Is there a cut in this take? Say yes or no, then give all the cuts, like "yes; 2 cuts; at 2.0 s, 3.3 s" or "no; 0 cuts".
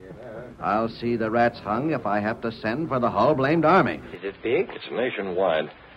yes; 1 cut; at 4.1 s